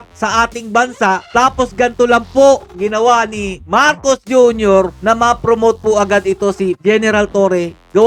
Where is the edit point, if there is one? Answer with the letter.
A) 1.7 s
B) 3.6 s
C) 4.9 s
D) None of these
D